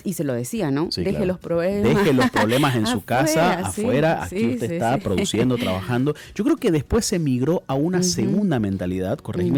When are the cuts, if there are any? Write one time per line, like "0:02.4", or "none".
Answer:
none